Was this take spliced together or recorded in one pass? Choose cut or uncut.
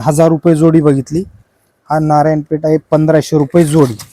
uncut